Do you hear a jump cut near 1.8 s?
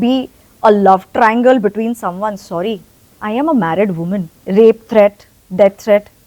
no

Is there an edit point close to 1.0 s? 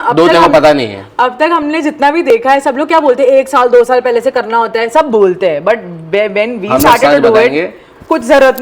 no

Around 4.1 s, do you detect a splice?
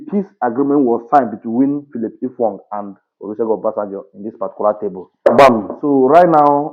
no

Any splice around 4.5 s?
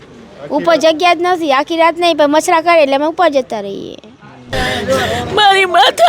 yes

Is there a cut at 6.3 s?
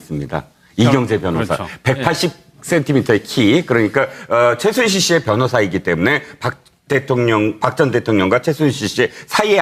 no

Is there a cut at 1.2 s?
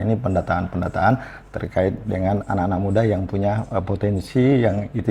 no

